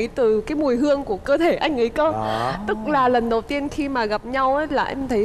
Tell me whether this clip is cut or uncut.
uncut